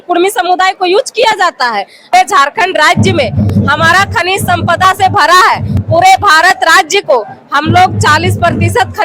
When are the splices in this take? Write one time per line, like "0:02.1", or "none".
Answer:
0:02.1

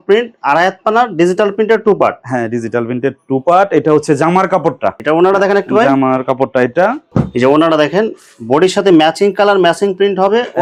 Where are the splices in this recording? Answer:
none

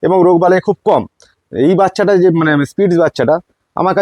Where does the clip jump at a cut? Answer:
none

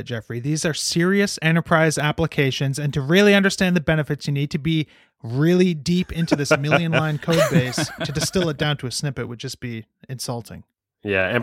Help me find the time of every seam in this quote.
0:08.0

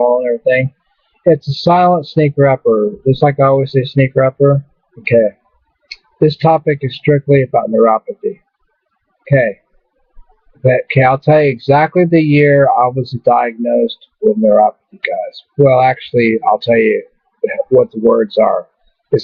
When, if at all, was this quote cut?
0:16.7

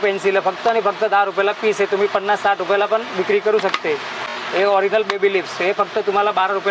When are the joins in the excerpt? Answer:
none

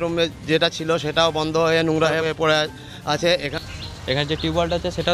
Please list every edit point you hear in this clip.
0:02.2
0:03.5

